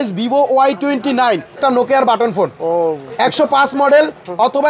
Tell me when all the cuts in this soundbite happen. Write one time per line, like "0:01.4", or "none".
0:01.6